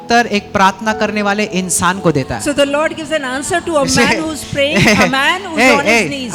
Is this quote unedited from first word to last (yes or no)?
yes